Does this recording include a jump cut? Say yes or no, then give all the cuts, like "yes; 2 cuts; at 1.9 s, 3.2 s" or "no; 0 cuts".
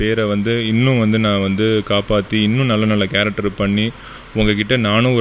no; 0 cuts